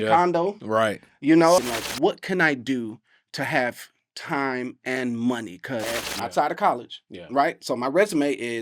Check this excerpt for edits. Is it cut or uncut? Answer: cut